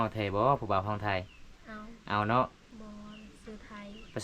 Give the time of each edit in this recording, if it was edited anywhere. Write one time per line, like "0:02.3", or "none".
0:02.7